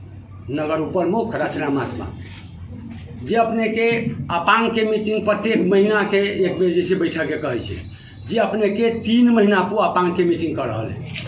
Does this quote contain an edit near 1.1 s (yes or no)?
no